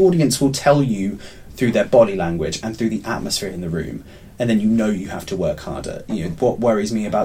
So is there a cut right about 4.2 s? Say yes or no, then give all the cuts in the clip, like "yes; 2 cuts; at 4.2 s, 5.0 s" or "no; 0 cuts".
no; 0 cuts